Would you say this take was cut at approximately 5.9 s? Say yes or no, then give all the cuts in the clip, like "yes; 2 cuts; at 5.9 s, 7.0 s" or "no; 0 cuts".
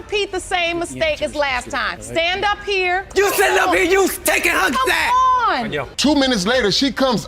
yes; 1 cut; at 5.9 s